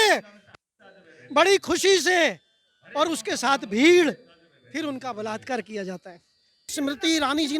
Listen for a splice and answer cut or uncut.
cut